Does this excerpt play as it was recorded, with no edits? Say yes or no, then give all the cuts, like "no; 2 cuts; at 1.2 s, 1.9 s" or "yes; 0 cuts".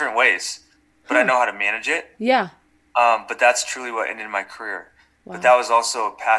yes; 0 cuts